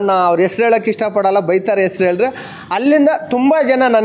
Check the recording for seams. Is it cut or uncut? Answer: uncut